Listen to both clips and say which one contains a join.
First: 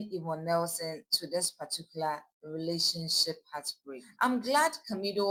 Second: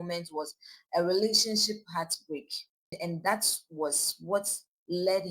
second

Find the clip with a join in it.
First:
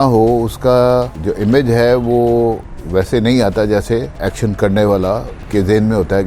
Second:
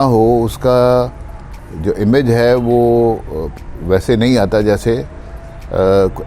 first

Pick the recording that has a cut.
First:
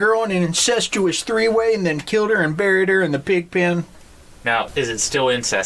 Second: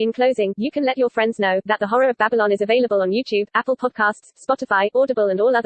first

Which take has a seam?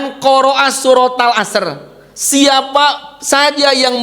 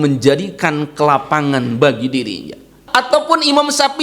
second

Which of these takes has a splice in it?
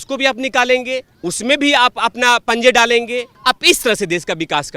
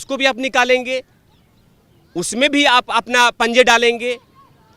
first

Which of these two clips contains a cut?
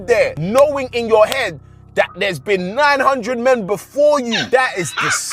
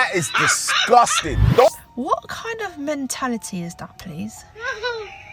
second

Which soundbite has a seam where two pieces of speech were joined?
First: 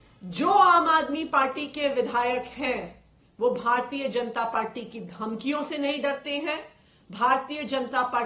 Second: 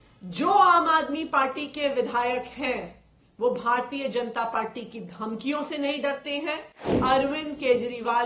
second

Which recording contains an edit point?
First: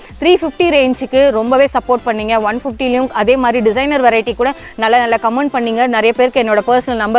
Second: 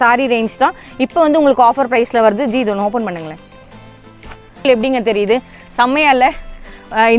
second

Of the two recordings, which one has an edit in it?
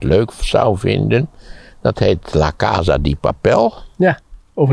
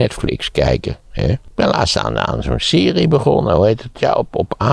second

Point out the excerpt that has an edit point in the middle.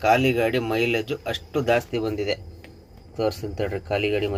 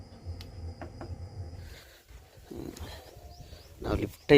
second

